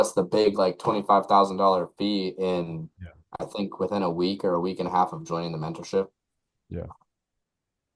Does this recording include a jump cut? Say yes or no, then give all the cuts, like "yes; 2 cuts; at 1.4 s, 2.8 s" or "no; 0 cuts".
no; 0 cuts